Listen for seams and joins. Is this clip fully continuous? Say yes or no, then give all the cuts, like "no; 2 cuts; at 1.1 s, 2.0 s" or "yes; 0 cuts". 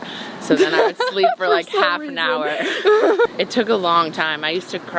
no; 1 cut; at 3.3 s